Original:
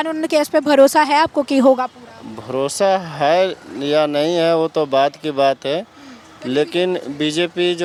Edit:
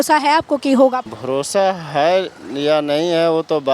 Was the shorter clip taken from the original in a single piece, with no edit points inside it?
no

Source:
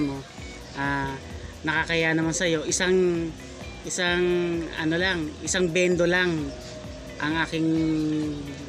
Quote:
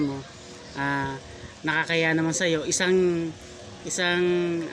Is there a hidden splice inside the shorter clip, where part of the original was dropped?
no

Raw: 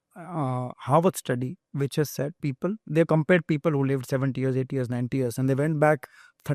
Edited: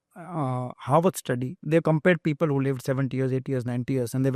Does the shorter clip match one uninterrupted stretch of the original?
no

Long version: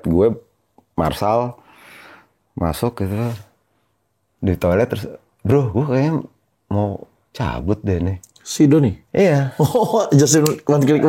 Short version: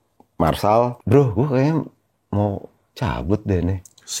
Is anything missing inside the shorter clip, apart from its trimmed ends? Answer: yes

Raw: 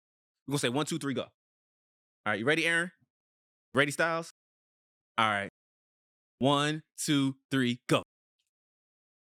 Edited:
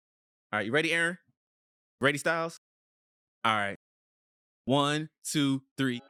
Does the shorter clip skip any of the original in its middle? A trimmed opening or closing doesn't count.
no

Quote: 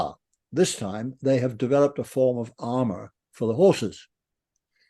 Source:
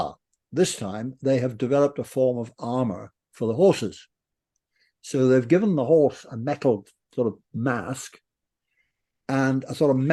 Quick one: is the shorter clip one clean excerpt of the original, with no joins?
yes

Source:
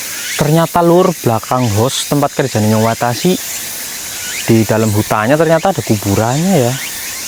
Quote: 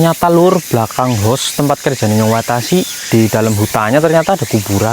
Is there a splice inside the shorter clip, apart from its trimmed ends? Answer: yes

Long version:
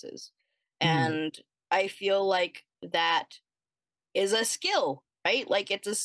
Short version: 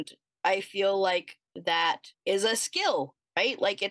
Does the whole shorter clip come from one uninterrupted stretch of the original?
no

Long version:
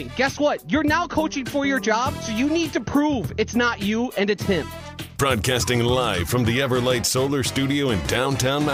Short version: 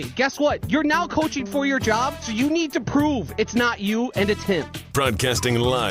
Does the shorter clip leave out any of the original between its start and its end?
yes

